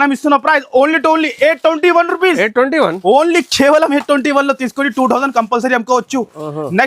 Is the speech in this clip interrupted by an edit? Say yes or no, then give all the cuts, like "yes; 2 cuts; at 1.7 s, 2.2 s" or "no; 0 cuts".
no; 0 cuts